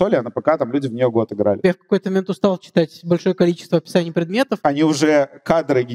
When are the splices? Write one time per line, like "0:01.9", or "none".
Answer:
0:01.6
0:04.5